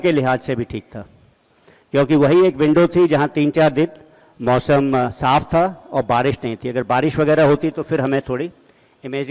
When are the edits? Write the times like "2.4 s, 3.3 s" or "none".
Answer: none